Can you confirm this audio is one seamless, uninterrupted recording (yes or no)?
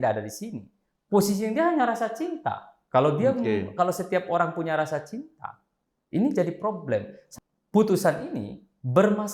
no